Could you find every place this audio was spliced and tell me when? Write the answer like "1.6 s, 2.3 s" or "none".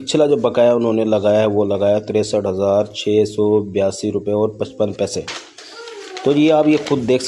none